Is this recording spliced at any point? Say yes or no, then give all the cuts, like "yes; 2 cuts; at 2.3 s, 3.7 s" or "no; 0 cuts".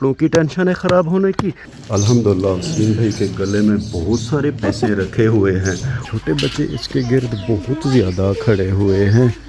yes; 2 cuts; at 1.7 s, 6.0 s